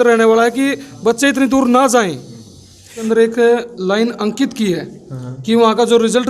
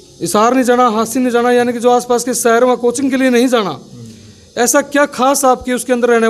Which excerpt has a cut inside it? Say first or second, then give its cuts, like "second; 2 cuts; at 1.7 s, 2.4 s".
first; 1 cut; at 3.0 s